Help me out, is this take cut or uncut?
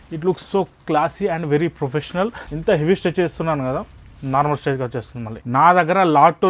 cut